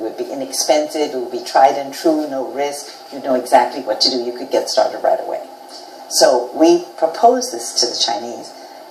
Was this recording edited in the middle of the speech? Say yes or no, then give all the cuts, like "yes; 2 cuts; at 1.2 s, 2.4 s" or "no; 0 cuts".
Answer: no; 0 cuts